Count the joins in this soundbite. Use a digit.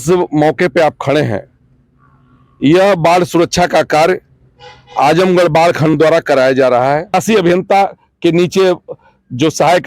1